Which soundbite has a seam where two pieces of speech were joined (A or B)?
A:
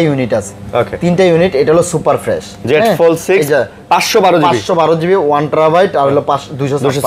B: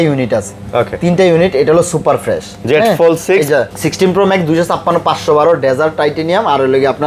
B